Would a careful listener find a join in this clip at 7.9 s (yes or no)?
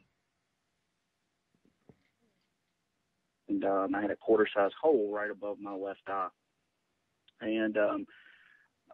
no